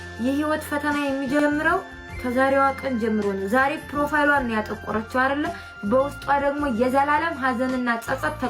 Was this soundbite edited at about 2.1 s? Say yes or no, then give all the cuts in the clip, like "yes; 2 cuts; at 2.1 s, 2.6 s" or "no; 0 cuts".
no; 0 cuts